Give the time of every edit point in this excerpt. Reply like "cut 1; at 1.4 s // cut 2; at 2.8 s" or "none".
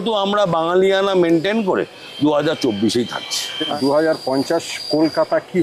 cut 1; at 3.6 s